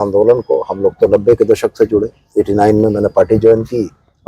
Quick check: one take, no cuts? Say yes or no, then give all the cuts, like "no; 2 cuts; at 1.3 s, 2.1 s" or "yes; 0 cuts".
yes; 0 cuts